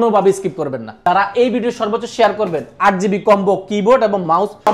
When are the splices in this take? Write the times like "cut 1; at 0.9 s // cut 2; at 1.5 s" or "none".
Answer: cut 1; at 1.0 s